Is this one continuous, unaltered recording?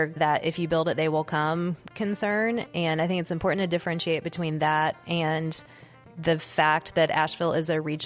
yes; 0 cuts

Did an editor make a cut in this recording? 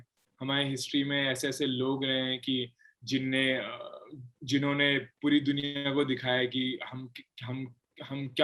no; 0 cuts

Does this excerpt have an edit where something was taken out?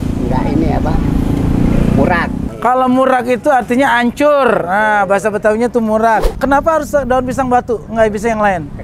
yes; 2 cuts; at 2.4 s, 6.3 s

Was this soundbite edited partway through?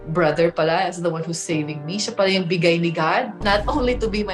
no; 0 cuts

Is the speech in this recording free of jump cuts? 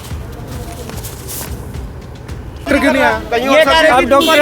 no; 1 cut; at 2.7 s

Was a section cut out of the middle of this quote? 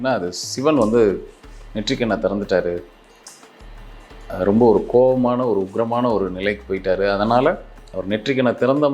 no; 0 cuts

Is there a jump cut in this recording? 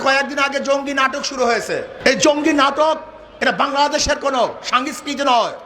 yes; 1 cut; at 1.9 s

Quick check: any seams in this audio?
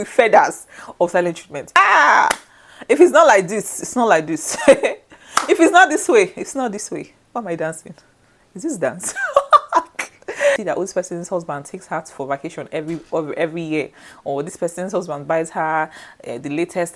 yes; 2 cuts; at 1.8 s, 10.6 s

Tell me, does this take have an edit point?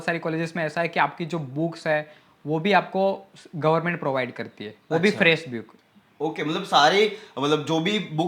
no; 0 cuts

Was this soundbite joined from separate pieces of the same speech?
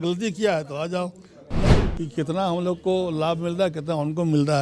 yes; 1 cut; at 1.7 s

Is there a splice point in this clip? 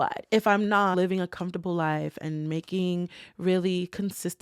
yes; 1 cut; at 0.9 s

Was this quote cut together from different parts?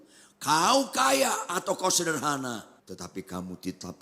yes; 1 cut; at 2.7 s

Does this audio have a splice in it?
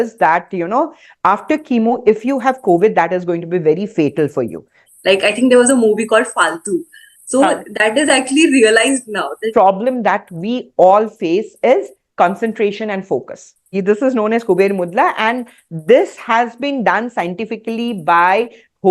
yes; 3 cuts; at 4.8 s, 9.5 s, 13.7 s

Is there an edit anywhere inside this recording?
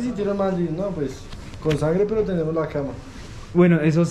no; 0 cuts

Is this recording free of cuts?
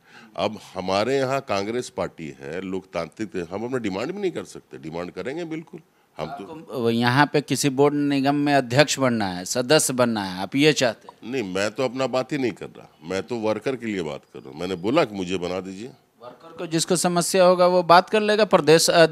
yes; 0 cuts

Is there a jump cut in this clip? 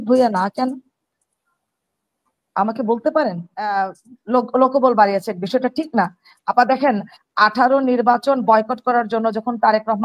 yes; 1 cut; at 3.7 s

